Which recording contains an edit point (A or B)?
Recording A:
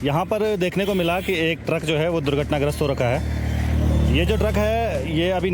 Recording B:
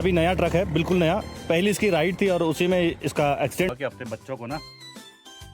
B